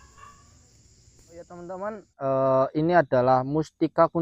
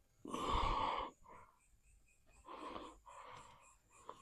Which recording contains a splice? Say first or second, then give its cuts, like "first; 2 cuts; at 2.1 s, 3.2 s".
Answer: first; 1 cut; at 1.5 s